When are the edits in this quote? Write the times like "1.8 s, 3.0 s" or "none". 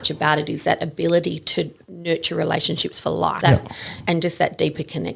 3.4 s